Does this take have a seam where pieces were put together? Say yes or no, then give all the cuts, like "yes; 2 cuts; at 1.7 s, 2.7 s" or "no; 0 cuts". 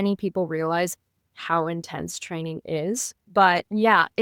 no; 0 cuts